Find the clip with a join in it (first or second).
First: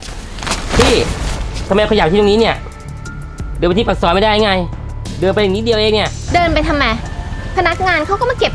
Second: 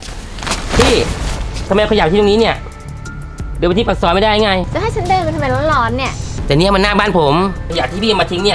second